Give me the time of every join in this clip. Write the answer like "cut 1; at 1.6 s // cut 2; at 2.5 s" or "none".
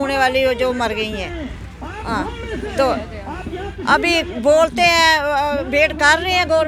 none